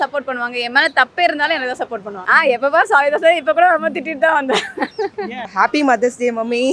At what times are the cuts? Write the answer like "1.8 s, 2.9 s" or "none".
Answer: 2.2 s, 5.4 s